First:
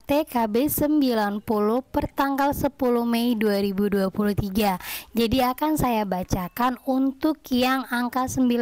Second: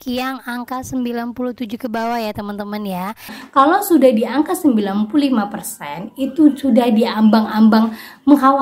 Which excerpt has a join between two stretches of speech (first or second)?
second